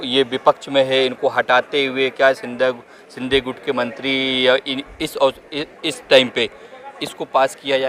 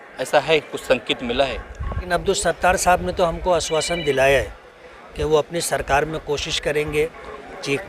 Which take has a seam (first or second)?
second